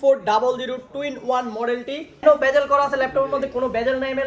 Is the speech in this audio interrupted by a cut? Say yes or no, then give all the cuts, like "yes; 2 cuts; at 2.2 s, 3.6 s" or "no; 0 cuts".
yes; 1 cut; at 2.2 s